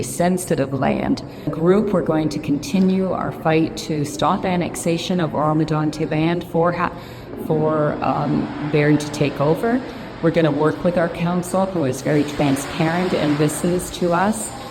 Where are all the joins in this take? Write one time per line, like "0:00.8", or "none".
0:01.4